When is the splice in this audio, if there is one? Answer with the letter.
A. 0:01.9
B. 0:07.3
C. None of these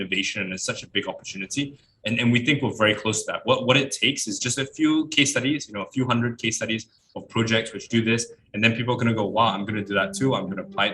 A